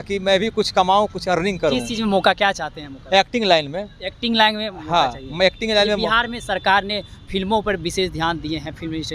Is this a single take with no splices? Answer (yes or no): yes